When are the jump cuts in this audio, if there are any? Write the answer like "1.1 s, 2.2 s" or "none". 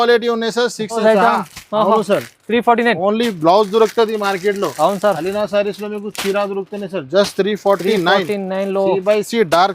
1.0 s